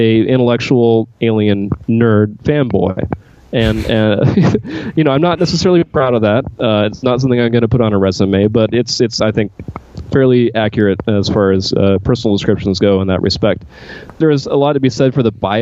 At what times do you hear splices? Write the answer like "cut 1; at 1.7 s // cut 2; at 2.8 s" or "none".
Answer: cut 1; at 14.0 s